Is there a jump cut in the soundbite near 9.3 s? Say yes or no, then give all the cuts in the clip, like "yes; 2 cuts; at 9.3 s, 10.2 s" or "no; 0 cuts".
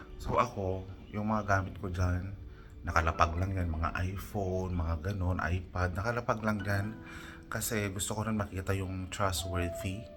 no; 0 cuts